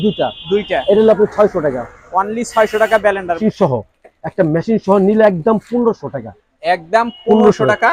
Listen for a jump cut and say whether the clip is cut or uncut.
cut